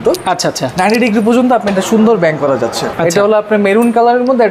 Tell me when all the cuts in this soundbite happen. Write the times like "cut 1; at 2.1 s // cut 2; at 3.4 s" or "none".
cut 1; at 2.9 s